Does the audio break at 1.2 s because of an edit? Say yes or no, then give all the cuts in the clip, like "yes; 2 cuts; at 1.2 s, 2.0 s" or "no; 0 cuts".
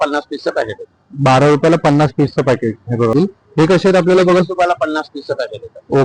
no; 1 cut; at 3.1 s